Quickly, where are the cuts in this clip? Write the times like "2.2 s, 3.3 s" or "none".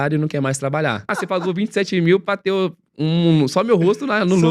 1.1 s